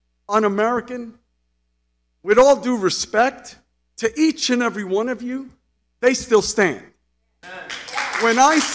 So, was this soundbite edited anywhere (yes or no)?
no